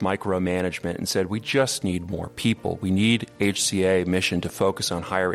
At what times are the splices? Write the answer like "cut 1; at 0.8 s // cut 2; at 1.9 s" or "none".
none

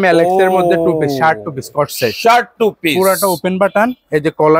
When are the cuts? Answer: none

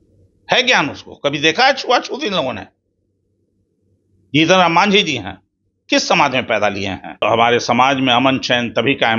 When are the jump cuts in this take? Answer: cut 1; at 7.2 s

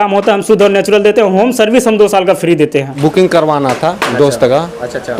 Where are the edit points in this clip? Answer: cut 1; at 2.9 s

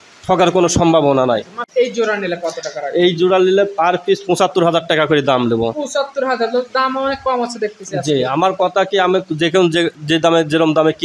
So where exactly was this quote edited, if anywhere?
cut 1; at 1.6 s

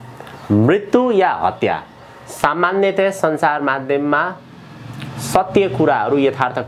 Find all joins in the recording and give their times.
none

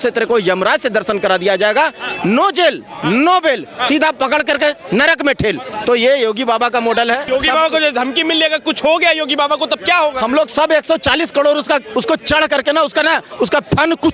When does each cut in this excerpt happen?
cut 1; at 5.7 s // cut 2; at 7.2 s

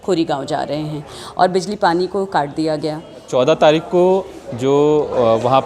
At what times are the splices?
cut 1; at 3.3 s

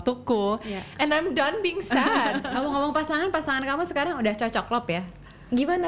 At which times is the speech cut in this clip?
cut 1; at 2.5 s

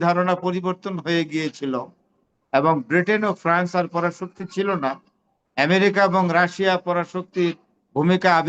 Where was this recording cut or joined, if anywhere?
none

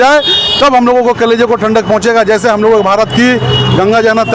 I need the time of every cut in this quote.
none

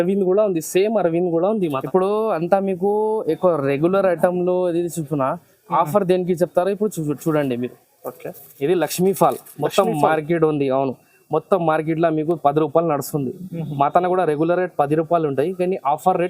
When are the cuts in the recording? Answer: cut 1; at 1.8 s

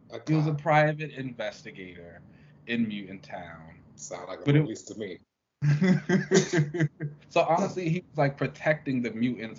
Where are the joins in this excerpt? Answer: cut 1; at 7.1 s

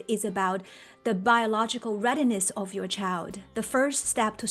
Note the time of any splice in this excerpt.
cut 1; at 3.4 s

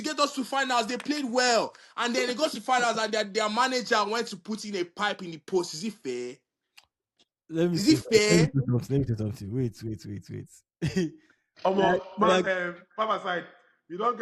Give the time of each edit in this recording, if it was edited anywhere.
none

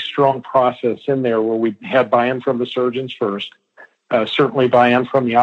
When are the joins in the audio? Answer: cut 1; at 1.8 s

